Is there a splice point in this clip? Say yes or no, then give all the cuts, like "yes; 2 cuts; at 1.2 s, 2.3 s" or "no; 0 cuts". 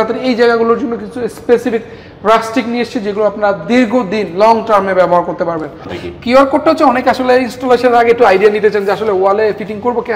yes; 1 cut; at 5.9 s